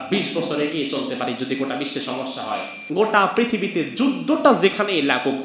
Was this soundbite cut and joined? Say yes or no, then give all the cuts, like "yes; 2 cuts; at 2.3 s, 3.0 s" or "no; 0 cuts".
yes; 1 cut; at 2.8 s